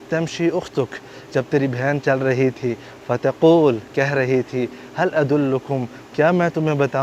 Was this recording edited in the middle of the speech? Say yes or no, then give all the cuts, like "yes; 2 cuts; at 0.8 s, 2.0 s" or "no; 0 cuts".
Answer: no; 0 cuts